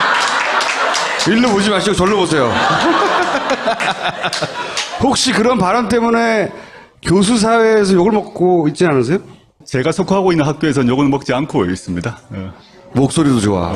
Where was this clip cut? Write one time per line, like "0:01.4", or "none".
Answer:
0:05.8